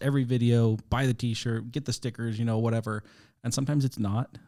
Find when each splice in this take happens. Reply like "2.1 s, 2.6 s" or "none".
none